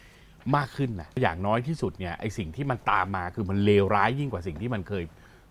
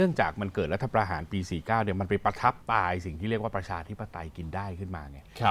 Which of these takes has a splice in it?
first; 1 cut; at 1.2 s

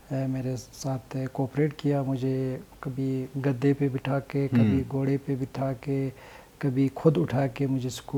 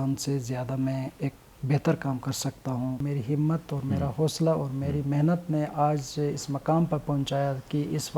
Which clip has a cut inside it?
second; 1 cut; at 3.1 s

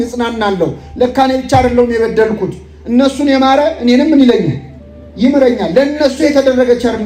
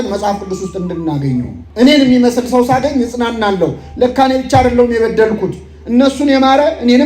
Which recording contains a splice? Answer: second; 1 cut; at 1.6 s

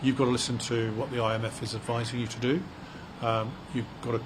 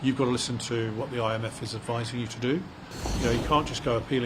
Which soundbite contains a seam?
second; 1 cut; at 3.0 s

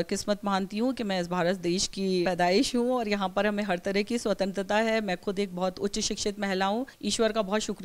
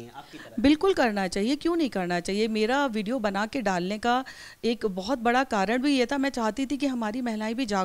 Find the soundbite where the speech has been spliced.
first; 2 cuts; at 2.2 s, 7.0 s

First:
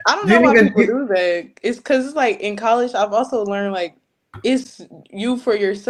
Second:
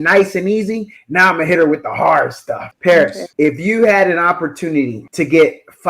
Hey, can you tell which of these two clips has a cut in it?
second; 3 cuts; at 2.7 s, 3.2 s, 5.0 s

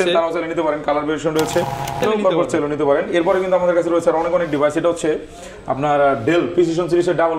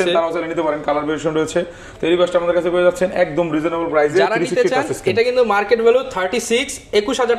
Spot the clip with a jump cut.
first; 1 cut; at 2.0 s

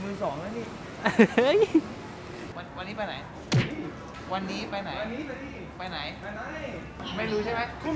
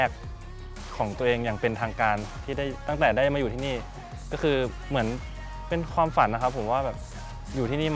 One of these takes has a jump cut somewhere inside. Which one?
first; 2 cuts; at 2.6 s, 7.0 s

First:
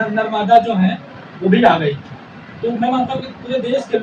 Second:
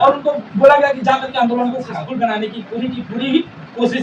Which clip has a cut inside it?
second; 1 cut; at 1.8 s

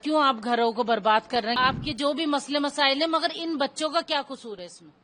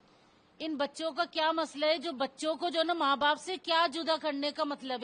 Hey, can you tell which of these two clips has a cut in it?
first; 1 cut; at 1.6 s

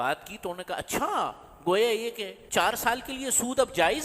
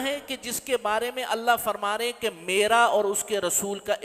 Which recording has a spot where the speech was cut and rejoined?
first; 1 cut; at 2.3 s

